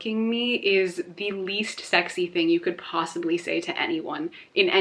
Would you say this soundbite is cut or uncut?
uncut